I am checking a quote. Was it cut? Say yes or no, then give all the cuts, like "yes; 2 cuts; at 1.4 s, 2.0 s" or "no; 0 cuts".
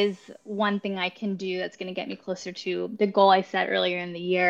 no; 0 cuts